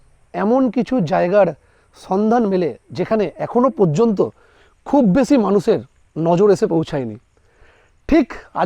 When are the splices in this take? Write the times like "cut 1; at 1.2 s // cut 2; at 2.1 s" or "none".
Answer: none